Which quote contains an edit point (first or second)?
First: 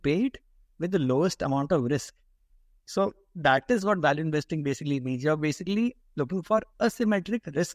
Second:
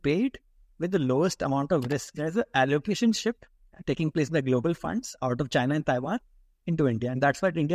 second